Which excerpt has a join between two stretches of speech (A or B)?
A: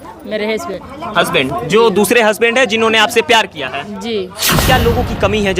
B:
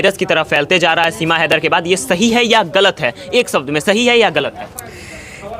A